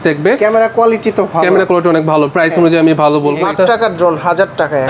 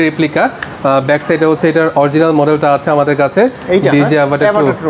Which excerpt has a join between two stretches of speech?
first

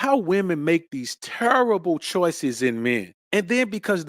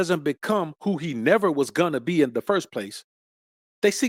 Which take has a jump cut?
first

